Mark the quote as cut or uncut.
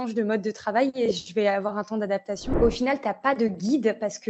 cut